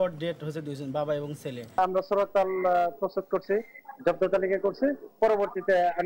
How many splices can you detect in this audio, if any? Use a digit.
1